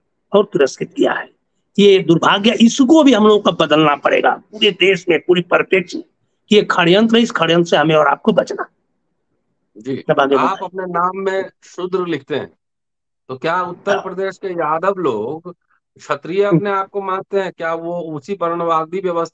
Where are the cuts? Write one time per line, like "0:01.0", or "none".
none